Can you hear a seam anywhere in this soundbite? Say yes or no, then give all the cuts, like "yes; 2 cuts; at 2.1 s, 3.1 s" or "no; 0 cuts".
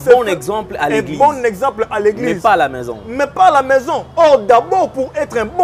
no; 0 cuts